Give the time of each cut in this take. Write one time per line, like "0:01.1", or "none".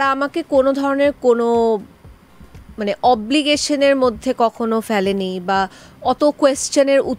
none

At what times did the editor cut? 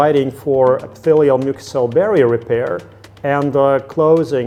none

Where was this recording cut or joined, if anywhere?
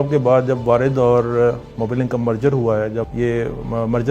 0:03.1

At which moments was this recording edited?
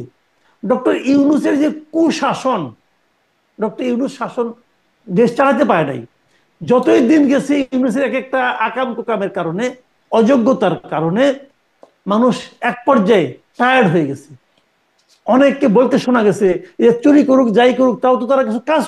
none

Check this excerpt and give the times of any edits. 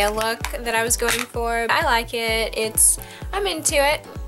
0:01.7

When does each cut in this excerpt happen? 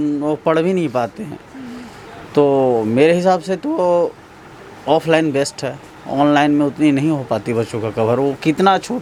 none

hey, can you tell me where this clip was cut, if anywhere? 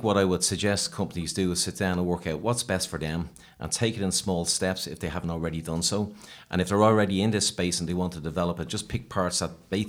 none

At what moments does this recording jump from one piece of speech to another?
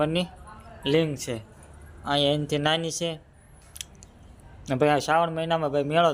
none

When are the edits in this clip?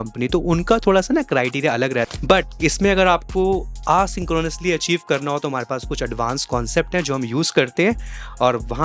0:02.1

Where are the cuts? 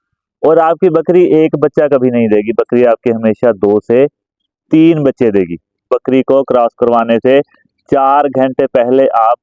0:05.9

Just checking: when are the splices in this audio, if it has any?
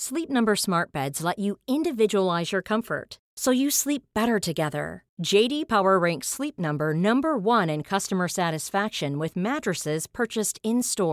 none

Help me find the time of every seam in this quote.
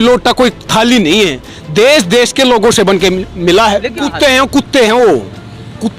0:04.1

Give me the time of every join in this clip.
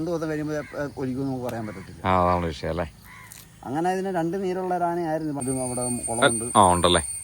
0:05.4

